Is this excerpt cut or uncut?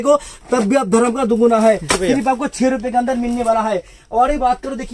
uncut